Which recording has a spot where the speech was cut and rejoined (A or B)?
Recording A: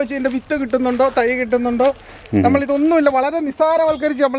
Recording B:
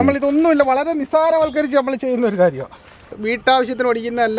B